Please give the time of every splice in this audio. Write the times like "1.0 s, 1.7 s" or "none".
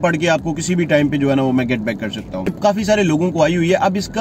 2.5 s